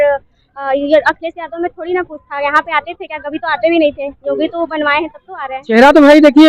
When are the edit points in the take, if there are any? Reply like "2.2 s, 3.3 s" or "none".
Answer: 5.3 s